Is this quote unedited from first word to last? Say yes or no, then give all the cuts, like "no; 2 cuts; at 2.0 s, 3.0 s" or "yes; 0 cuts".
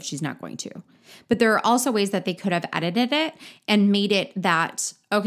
yes; 0 cuts